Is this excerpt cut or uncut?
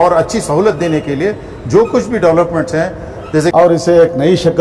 cut